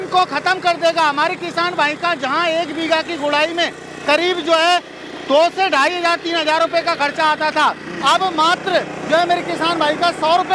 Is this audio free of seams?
yes; 0 cuts

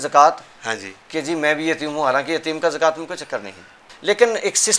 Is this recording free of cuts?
no; 1 cut; at 3.9 s

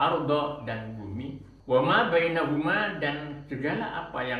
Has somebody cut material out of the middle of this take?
yes; 1 cut; at 1.5 s

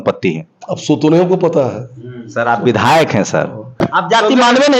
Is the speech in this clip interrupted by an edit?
yes; 1 cut; at 3.8 s

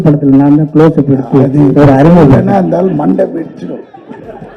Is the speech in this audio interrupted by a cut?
no; 0 cuts

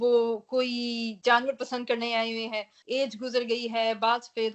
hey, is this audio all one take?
no; 1 cut; at 2.7 s

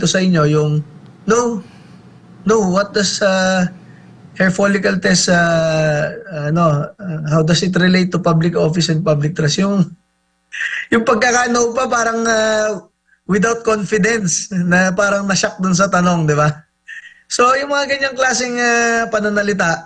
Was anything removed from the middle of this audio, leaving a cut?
no; 0 cuts

